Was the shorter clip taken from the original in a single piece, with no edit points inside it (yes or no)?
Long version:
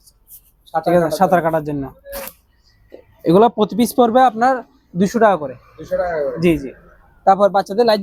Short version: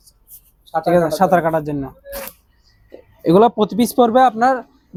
yes